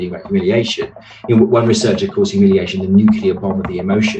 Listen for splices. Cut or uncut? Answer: uncut